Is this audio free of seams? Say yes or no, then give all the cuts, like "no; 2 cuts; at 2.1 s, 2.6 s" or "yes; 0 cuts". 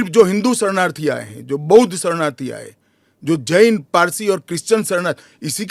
yes; 0 cuts